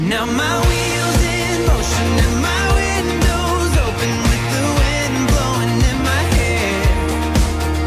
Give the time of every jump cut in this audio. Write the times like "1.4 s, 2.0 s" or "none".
none